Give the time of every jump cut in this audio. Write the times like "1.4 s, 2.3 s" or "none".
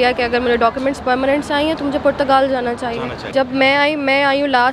3.2 s